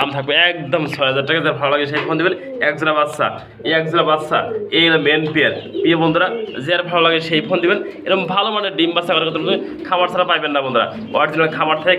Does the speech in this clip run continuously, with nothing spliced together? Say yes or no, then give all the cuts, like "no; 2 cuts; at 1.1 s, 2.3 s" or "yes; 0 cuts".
yes; 0 cuts